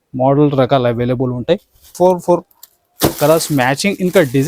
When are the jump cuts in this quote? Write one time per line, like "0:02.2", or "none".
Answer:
0:01.8